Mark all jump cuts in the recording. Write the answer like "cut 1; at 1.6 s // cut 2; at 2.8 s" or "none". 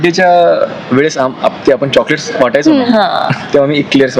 none